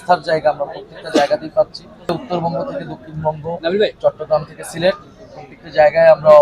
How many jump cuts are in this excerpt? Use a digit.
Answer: 1